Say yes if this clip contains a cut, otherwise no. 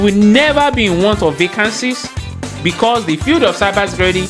no